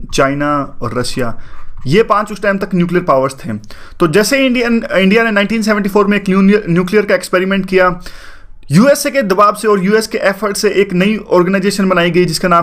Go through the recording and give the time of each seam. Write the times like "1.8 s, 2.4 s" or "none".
8.5 s